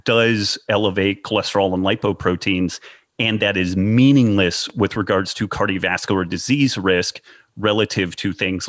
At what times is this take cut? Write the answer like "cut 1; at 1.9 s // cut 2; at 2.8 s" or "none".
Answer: none